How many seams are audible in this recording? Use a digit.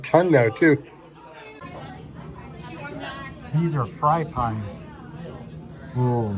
1